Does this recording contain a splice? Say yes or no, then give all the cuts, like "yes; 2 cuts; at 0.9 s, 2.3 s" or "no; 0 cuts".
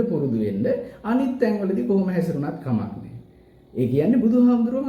no; 0 cuts